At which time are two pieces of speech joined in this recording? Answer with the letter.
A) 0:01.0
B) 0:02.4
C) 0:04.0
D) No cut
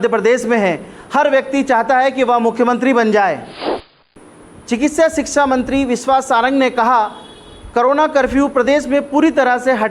C